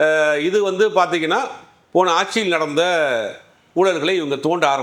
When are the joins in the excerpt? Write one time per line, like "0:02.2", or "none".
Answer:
none